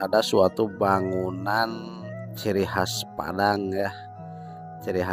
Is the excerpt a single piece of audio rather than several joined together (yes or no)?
yes